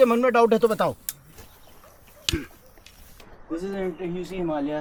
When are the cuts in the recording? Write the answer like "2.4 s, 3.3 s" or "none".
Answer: none